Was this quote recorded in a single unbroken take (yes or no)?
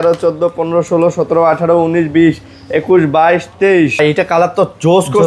no